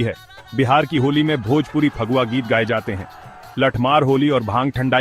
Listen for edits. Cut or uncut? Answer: uncut